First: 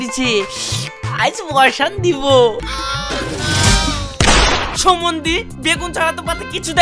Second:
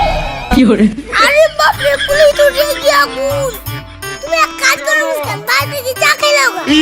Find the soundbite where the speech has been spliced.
first; 1 cut; at 2.5 s

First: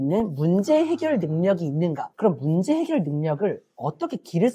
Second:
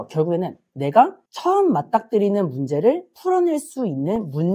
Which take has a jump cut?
first; 1 cut; at 2.0 s

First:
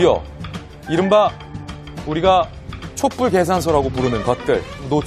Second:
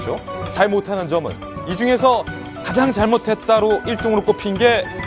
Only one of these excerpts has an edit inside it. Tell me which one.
second; 1 cut; at 3.0 s

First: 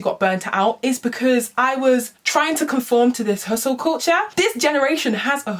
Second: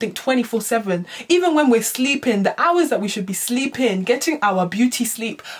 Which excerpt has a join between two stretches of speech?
first; 2 cuts; at 2.2 s, 4.3 s

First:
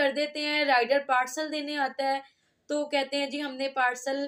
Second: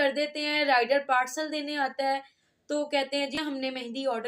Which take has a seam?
second; 1 cut; at 3.4 s

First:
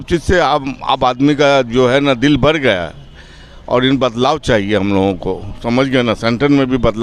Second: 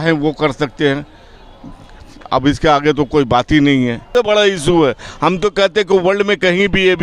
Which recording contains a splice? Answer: second; 1 cut; at 4.1 s

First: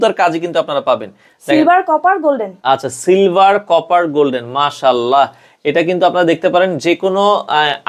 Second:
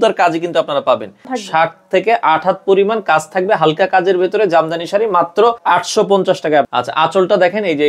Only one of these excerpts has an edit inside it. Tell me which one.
second; 3 cuts; at 1.3 s, 5.6 s, 6.7 s

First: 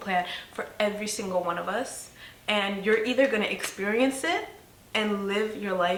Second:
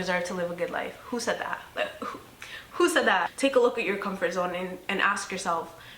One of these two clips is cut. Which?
second; 1 cut; at 3.3 s

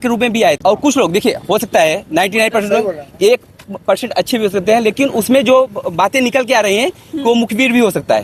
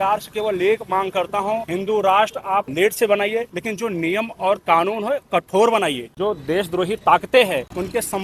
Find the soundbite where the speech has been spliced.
second; 3 cuts; at 1.7 s, 2.7 s, 3.5 s

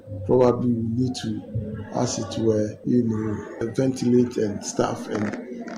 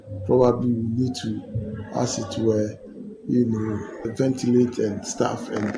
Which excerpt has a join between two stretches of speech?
first; 1 cut; at 3.1 s

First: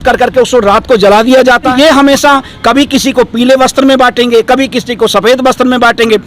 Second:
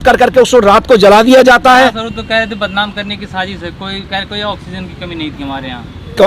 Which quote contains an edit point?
first; 1 cut; at 1.7 s

